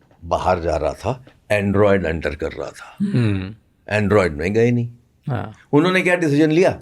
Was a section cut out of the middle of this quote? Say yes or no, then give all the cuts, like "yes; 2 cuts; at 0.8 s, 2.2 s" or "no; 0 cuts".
no; 0 cuts